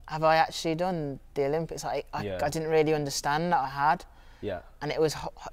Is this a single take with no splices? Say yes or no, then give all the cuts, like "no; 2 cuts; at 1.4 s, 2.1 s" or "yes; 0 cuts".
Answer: yes; 0 cuts